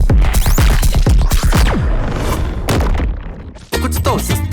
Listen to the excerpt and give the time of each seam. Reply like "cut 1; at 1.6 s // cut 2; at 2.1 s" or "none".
cut 1; at 3.6 s